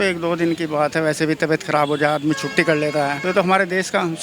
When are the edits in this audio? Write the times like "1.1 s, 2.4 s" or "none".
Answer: 3.2 s